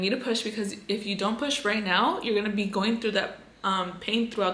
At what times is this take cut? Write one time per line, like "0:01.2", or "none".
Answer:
none